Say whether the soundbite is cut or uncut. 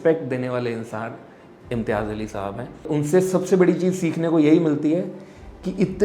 cut